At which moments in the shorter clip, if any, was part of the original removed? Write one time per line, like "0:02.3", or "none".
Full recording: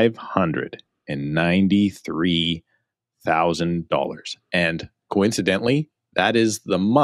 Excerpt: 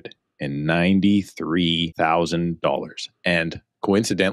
0:01.9